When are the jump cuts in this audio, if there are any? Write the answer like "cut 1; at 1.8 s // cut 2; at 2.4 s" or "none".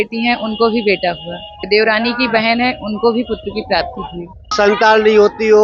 cut 1; at 1.6 s // cut 2; at 4.5 s